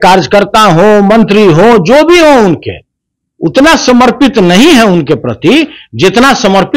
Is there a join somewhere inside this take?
no; 0 cuts

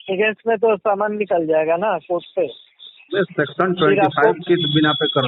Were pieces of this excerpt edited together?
no; 0 cuts

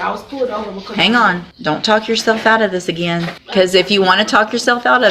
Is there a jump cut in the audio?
yes; 2 cuts; at 1.5 s, 3.4 s

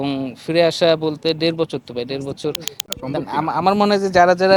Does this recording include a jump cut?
yes; 1 cut; at 2.7 s

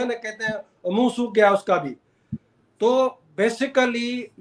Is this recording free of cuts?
yes; 0 cuts

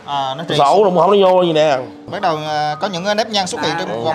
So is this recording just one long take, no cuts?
no; 1 cut; at 2.1 s

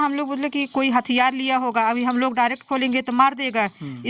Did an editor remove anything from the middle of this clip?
no; 0 cuts

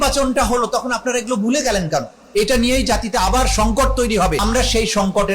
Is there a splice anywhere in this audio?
yes; 2 cuts; at 2.1 s, 4.4 s

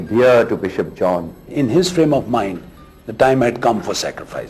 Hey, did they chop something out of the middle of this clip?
yes; 1 cut; at 1.5 s

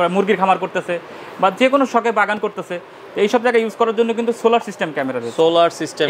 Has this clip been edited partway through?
no; 0 cuts

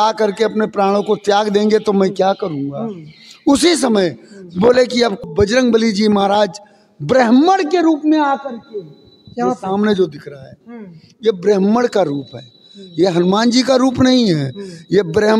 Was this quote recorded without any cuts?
no; 1 cut; at 5.2 s

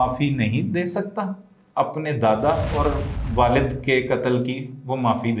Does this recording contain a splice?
no; 0 cuts

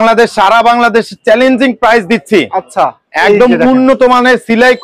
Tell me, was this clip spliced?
no; 0 cuts

